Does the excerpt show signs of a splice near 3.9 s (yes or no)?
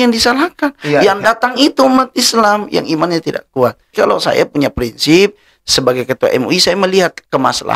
yes